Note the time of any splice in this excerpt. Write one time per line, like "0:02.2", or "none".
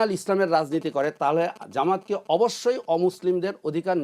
none